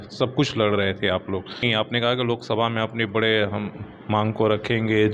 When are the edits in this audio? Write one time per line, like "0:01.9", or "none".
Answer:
0:01.6